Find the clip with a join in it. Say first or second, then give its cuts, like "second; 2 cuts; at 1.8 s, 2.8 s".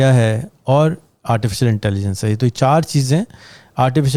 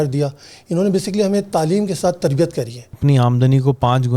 second; 1 cut; at 2.9 s